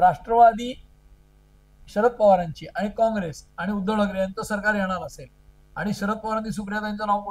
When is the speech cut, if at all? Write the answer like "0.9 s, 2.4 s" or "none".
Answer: none